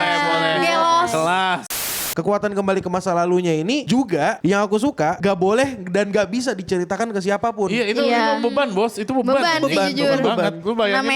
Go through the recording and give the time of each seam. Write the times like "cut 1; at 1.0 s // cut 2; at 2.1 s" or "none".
cut 1; at 1.9 s // cut 2; at 3.8 s // cut 3; at 5.2 s